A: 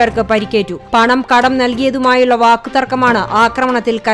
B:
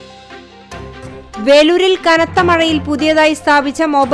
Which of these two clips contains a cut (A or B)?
B